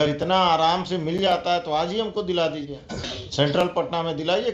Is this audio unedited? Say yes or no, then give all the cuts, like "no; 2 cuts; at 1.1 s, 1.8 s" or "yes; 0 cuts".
no; 1 cut; at 3.2 s